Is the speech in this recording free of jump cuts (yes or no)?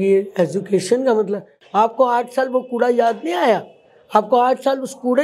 no